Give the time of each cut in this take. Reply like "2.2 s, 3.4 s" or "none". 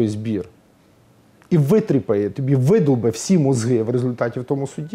none